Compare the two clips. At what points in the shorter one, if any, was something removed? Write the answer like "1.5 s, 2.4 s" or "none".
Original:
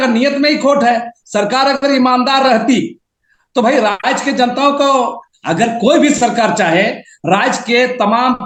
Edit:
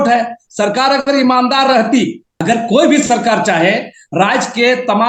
2.3 s